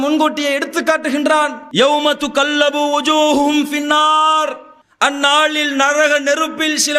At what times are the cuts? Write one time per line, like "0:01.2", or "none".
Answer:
none